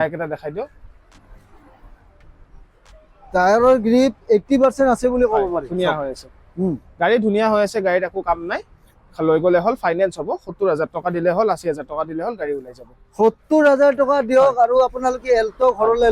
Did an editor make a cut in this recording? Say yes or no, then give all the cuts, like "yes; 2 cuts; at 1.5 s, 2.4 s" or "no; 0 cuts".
no; 0 cuts